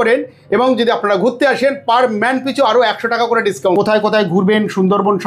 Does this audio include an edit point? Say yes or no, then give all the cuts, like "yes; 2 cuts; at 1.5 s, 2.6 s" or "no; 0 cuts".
yes; 1 cut; at 3.8 s